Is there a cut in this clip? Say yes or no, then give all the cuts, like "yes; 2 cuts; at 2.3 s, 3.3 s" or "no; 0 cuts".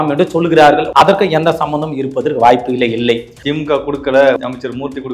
yes; 3 cuts; at 0.9 s, 3.3 s, 4.4 s